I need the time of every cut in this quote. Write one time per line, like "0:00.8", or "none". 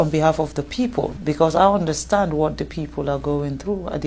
0:01.2